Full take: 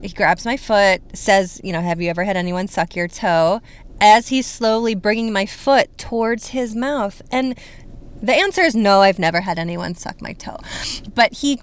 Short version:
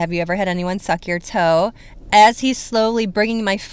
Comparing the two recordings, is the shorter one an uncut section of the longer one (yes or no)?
yes